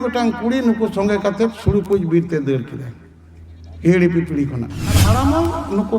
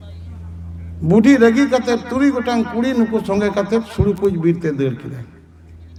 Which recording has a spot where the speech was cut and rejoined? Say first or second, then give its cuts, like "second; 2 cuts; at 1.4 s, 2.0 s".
first; 1 cut; at 5.0 s